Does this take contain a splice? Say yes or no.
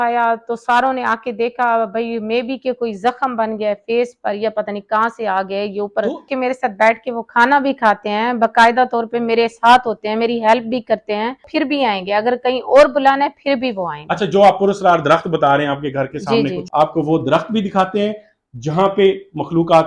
yes